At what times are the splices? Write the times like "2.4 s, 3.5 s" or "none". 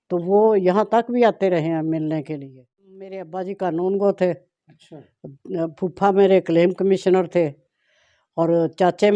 3.3 s